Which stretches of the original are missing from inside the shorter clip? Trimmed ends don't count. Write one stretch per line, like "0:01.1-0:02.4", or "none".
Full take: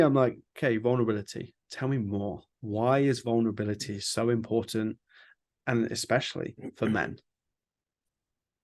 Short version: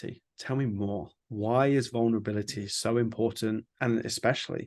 0:05.0-0:05.6